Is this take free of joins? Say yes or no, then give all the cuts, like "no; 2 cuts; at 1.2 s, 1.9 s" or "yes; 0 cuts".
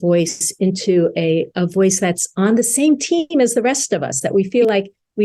yes; 0 cuts